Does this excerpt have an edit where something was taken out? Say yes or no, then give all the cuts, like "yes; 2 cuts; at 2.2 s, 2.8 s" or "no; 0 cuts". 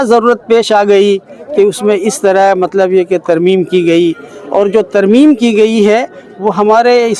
no; 0 cuts